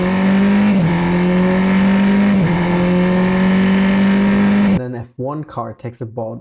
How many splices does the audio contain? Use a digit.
1